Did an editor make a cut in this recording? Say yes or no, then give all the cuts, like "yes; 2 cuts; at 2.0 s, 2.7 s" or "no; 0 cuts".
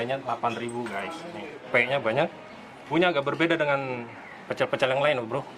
yes; 2 cuts; at 1.6 s, 2.9 s